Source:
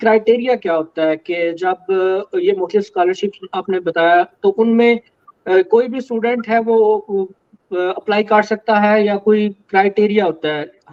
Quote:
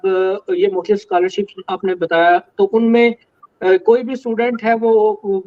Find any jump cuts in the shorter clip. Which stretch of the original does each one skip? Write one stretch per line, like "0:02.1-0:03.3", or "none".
none